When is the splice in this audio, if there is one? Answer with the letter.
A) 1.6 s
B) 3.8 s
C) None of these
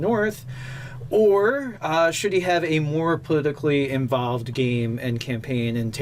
B